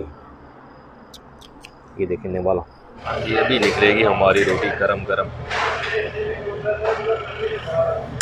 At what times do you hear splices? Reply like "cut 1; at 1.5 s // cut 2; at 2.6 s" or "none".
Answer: cut 1; at 3.1 s